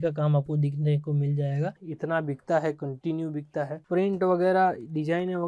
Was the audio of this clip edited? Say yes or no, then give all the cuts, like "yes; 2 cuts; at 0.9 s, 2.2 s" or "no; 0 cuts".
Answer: yes; 2 cuts; at 1.8 s, 3.8 s